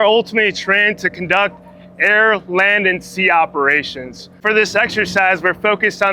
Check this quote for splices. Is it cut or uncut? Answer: uncut